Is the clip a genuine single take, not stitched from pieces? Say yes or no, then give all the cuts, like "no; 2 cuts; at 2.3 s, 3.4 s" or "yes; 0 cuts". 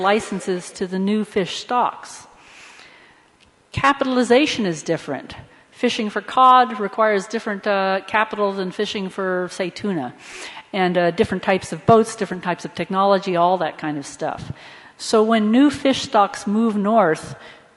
no; 1 cut; at 13.4 s